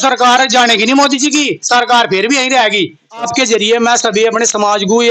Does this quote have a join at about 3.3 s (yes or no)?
yes